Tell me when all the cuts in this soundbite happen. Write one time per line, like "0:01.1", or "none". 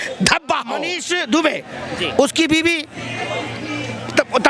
0:00.9